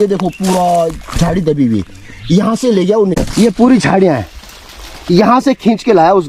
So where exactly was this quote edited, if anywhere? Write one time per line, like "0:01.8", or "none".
0:03.2